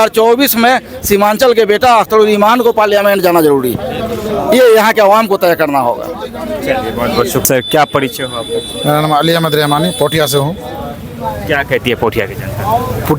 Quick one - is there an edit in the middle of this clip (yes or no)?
no